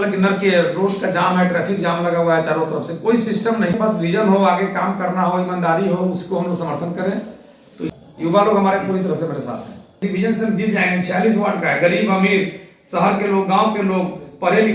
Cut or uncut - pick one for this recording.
cut